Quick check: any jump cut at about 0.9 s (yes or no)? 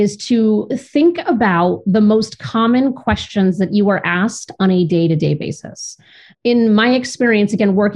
no